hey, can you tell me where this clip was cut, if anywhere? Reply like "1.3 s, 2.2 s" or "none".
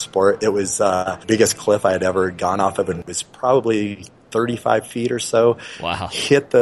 1.2 s, 3.1 s